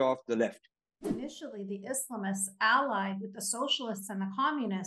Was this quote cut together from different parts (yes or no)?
yes